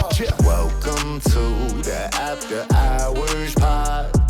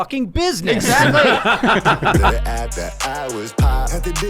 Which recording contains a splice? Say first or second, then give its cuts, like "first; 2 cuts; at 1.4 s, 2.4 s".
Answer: second; 1 cut; at 2.4 s